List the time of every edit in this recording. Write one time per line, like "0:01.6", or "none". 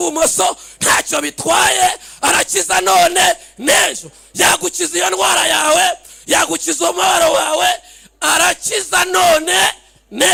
none